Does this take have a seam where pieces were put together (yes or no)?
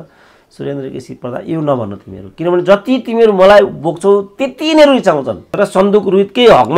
yes